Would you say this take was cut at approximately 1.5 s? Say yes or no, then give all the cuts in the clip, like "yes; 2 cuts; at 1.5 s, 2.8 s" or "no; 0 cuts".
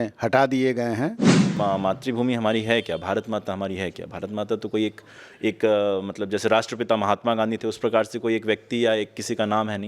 yes; 1 cut; at 1.5 s